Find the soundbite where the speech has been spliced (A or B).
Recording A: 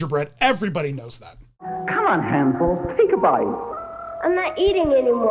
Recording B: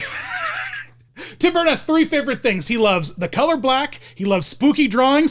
A